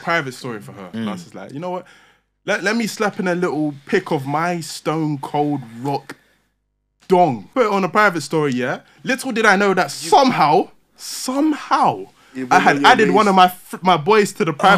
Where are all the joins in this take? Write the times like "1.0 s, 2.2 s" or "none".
0.9 s, 7.4 s